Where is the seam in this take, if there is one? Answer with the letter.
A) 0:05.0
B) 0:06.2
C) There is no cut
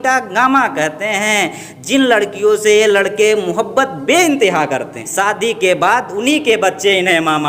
A